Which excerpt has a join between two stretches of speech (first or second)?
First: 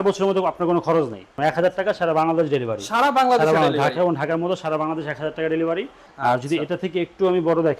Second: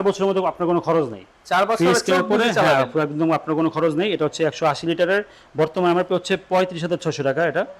first